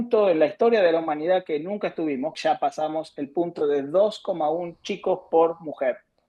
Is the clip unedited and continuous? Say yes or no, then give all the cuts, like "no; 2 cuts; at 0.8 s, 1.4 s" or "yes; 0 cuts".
no; 1 cut; at 2.3 s